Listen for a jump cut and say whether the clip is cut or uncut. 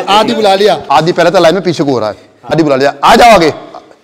cut